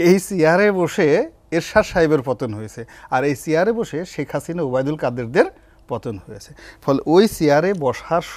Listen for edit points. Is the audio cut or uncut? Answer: uncut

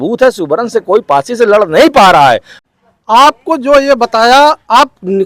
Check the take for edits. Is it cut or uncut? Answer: cut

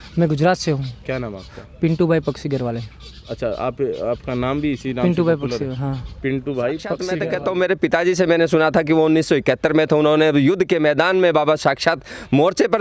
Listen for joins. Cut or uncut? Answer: cut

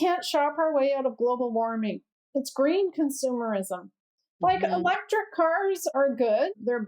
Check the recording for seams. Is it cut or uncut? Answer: cut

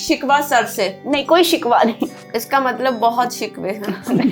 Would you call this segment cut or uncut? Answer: cut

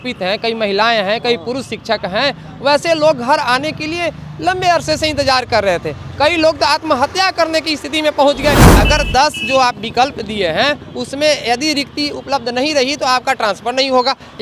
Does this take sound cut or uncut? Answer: cut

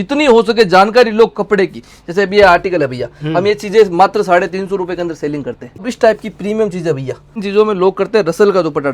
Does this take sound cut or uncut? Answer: cut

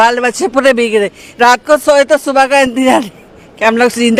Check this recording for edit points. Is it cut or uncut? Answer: uncut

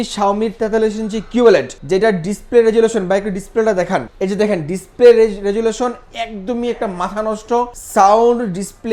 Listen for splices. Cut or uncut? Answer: uncut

